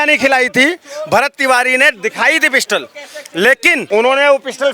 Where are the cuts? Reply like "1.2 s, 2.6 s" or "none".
3.8 s